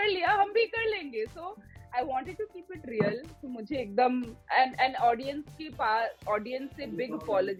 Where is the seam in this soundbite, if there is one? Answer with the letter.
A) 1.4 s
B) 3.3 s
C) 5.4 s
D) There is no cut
D